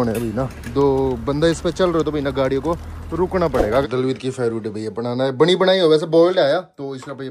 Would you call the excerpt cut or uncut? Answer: cut